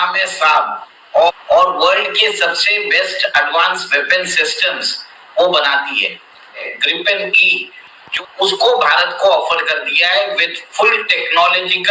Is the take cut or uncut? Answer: cut